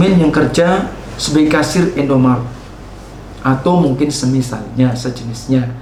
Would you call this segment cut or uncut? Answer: uncut